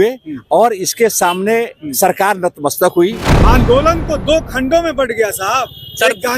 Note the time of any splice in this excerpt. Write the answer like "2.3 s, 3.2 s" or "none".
3.3 s